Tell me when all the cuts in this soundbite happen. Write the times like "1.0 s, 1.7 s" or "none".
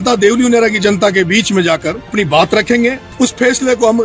2.1 s, 3.0 s